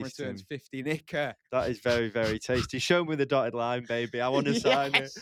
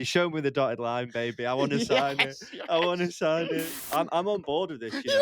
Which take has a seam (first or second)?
second